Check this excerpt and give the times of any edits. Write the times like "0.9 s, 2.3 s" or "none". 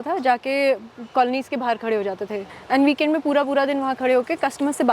2.4 s

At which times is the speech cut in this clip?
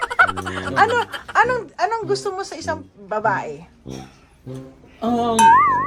none

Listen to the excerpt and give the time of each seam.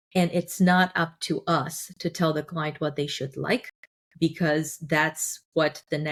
none

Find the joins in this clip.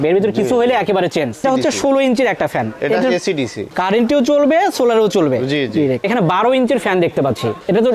1.4 s, 3.7 s, 6.1 s

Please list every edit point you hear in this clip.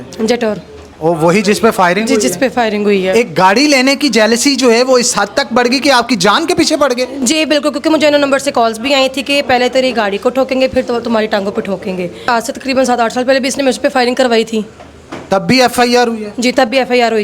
3.1 s, 12.3 s

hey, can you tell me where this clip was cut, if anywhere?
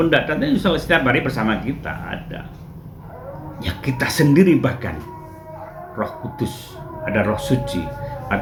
none

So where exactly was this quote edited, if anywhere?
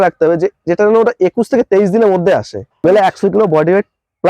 2.8 s

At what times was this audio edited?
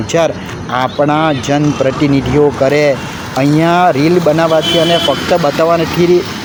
none

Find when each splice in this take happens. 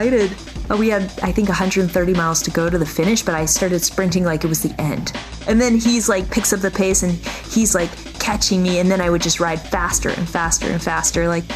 none

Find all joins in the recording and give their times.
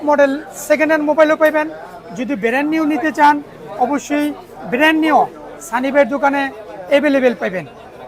none

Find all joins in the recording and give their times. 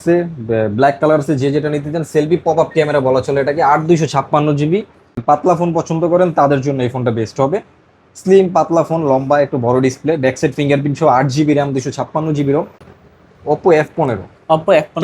5.2 s, 12.9 s

